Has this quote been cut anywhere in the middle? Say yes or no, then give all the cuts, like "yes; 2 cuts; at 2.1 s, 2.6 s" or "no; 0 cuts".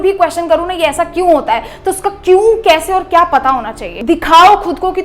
yes; 1 cut; at 3.9 s